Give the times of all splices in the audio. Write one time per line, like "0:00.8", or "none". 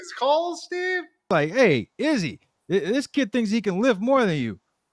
0:01.3

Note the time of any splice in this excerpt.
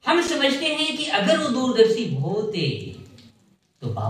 none

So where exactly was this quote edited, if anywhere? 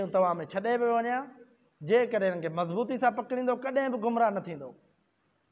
none

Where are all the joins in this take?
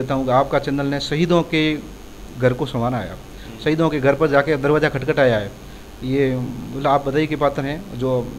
none

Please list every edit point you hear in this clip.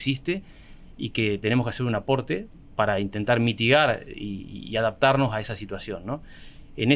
0:02.6

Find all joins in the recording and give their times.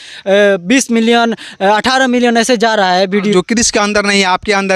none

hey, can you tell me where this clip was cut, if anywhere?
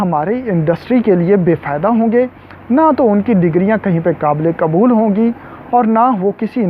none

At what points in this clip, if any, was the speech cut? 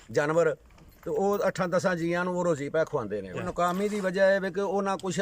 0:03.4

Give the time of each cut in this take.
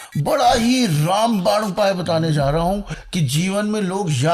0:03.0

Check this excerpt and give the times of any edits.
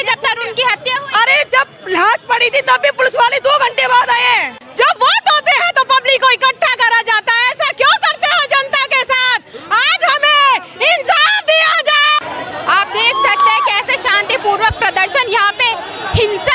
0:04.6
0:12.2

